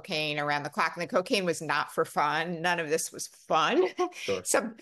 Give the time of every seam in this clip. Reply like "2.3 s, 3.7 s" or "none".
none